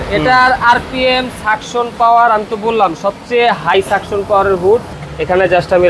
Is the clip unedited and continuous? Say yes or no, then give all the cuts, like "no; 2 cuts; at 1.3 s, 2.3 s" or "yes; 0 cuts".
no; 1 cut; at 4.9 s